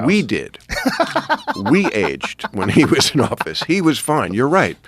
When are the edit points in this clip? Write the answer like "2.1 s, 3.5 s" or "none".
1.8 s